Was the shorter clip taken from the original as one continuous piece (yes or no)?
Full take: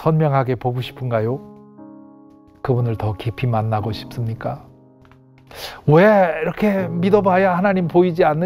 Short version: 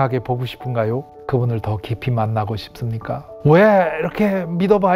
no